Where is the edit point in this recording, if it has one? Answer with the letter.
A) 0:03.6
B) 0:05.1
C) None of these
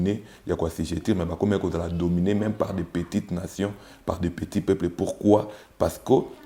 C